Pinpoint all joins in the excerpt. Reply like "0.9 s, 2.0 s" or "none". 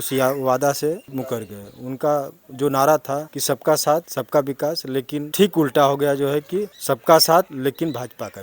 1.1 s, 3.3 s, 4.2 s, 5.3 s, 6.7 s, 7.5 s

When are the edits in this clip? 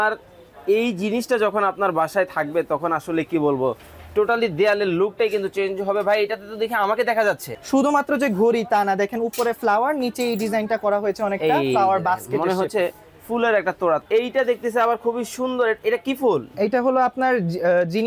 7.5 s, 14.0 s

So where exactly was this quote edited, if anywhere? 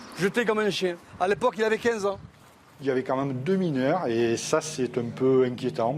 2.8 s

